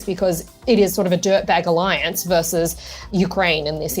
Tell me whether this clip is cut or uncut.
cut